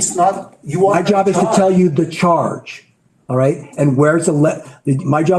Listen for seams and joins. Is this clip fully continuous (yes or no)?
yes